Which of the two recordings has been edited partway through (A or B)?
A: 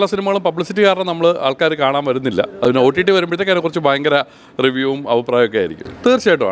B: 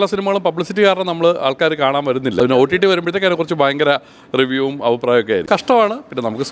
B